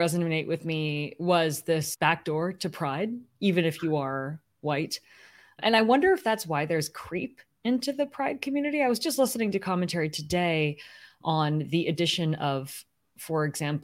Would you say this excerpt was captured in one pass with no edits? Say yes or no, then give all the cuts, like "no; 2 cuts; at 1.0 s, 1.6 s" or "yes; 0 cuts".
yes; 0 cuts